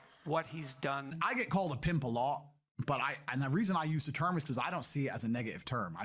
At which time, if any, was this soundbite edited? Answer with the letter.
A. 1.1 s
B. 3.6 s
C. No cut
A